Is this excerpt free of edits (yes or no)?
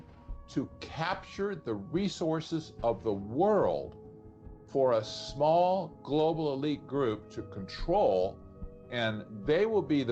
yes